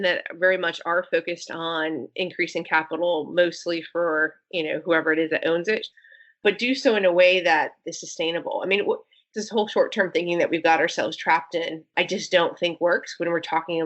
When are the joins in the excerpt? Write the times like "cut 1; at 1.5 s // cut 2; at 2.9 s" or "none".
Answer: cut 1; at 5.9 s // cut 2; at 9.2 s